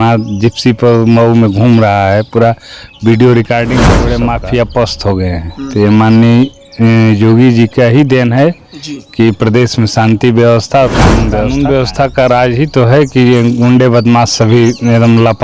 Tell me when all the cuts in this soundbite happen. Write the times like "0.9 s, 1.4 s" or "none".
4.1 s, 11.5 s